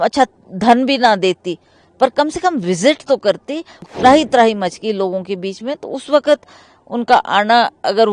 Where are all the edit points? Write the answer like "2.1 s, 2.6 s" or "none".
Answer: 3.9 s